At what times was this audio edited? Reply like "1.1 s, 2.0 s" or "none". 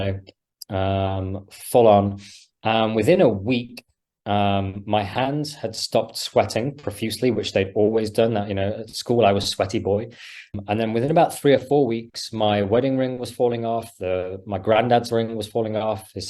10.5 s